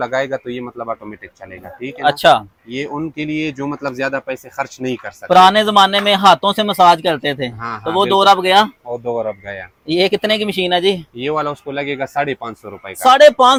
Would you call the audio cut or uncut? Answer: uncut